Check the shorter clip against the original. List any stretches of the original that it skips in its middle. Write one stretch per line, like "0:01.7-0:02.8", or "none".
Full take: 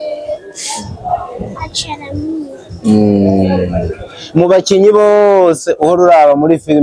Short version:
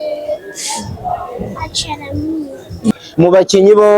0:02.9-0:04.1